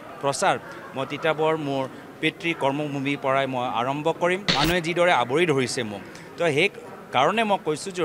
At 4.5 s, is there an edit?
yes; 1 cut; at 4.5 s

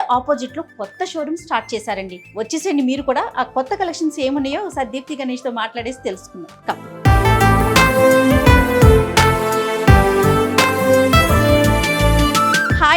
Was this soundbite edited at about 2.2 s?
yes; 1 cut; at 2.2 s

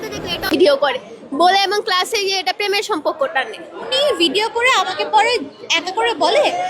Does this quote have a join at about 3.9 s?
yes; 1 cut; at 3.9 s

